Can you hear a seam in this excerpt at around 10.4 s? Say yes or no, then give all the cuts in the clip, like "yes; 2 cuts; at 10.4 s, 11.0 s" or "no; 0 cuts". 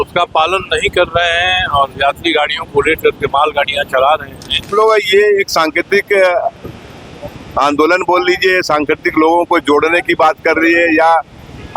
no; 1 cut; at 4.7 s